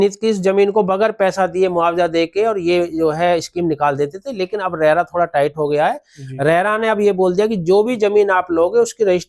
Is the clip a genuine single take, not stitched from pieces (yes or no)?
yes